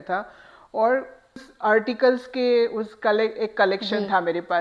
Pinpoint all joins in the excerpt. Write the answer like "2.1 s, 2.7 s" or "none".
1.5 s